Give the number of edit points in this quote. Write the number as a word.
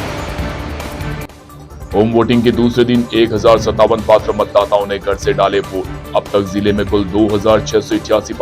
zero